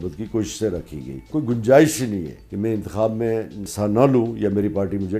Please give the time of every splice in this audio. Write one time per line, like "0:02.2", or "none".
0:01.3
0:02.4
0:03.6